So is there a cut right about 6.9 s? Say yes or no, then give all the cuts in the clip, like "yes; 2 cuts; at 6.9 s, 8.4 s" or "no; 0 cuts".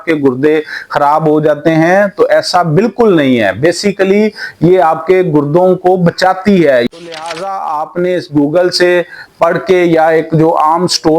yes; 1 cut; at 6.9 s